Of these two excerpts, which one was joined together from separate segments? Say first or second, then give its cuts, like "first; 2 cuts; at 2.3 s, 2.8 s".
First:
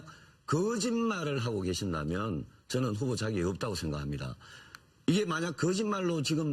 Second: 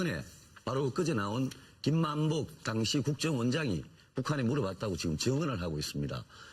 second; 1 cut; at 2.0 s